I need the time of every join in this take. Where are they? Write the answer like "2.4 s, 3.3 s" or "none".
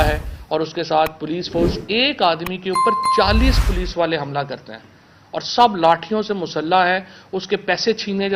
none